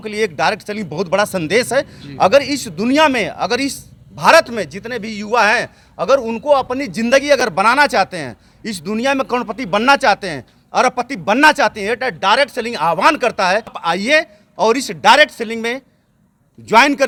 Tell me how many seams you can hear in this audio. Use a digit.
0